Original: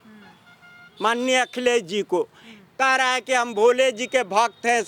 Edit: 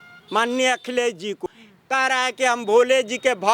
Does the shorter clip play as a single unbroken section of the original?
no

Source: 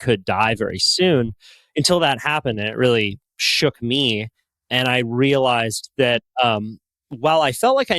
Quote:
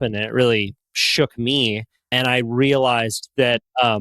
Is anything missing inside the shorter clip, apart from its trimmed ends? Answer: yes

